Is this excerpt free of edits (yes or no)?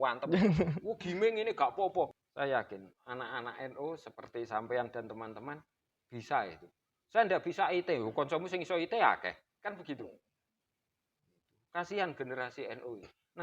no